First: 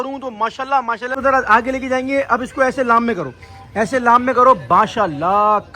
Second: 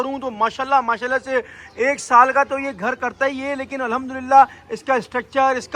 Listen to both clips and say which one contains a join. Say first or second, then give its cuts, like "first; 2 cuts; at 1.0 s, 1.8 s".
first; 1 cut; at 1.1 s